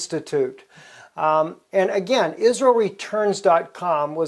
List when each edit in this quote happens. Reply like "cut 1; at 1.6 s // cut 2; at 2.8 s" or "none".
cut 1; at 2.3 s